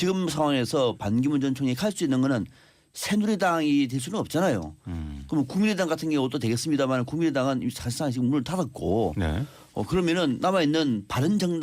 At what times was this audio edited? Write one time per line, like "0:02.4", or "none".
none